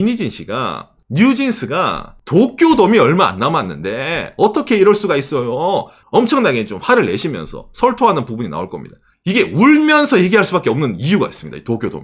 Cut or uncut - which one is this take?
cut